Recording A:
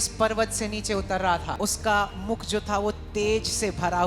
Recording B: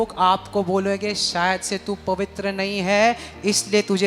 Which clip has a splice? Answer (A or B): A